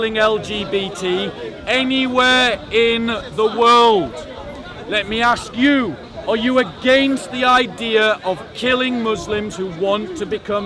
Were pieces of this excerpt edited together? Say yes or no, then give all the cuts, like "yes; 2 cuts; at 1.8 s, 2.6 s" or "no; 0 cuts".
no; 0 cuts